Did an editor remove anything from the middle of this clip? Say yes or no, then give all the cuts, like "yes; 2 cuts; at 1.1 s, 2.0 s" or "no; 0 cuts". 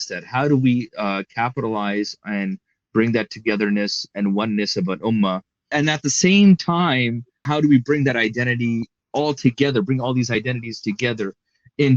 yes; 3 cuts; at 5.7 s, 7.4 s, 9.0 s